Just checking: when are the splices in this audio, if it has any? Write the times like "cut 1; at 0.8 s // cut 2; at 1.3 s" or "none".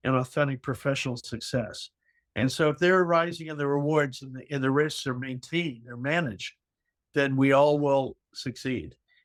none